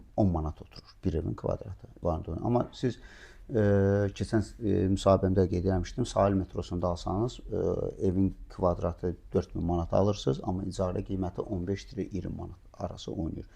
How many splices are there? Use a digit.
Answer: 1